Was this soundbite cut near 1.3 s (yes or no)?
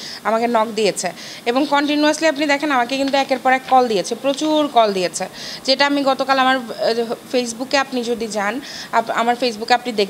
no